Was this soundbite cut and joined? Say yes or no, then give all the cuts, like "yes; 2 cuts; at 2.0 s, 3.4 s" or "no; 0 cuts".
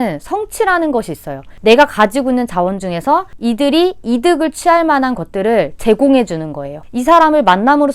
yes; 2 cuts; at 1.5 s, 6.7 s